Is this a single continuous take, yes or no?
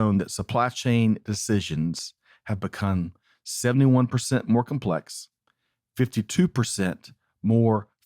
yes